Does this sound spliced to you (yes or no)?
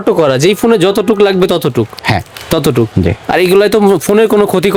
no